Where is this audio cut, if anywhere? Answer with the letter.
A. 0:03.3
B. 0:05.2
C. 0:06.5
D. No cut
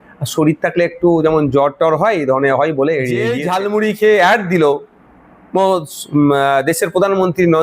A